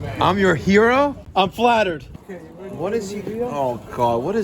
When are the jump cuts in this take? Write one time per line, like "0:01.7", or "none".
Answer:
0:01.2
0:02.2